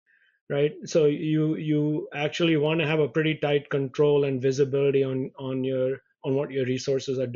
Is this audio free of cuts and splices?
yes; 0 cuts

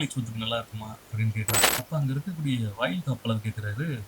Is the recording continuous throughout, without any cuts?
no; 1 cut; at 1.8 s

